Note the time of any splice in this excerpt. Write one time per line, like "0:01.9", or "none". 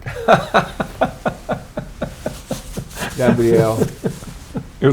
none